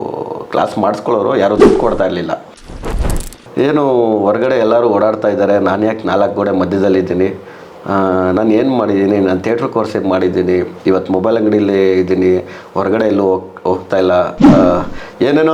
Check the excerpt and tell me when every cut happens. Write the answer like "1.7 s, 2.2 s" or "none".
2.9 s

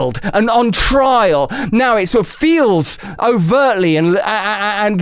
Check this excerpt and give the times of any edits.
1.6 s

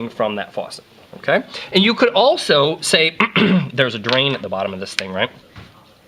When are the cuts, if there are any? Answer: none

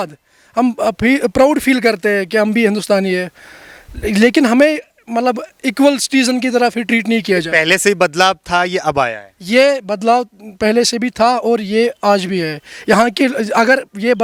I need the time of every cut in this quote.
none

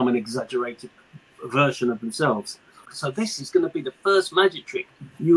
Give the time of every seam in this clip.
2.8 s

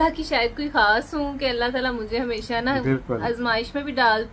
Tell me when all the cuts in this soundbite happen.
none

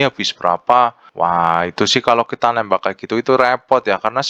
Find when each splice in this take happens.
1.0 s

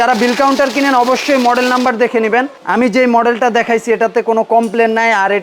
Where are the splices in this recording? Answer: 2.6 s

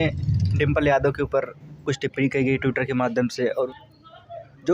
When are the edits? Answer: 3.7 s

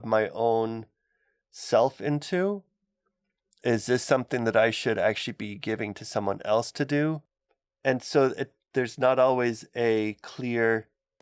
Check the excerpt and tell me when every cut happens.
none

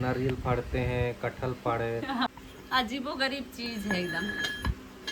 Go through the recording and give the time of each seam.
2.3 s

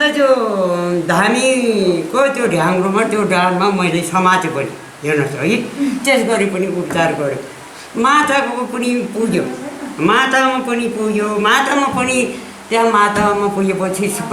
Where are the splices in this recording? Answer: none

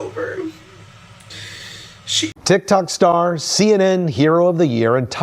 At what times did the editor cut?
2.3 s

